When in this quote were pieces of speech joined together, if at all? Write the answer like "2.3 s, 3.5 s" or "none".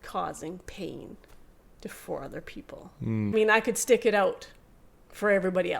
3.3 s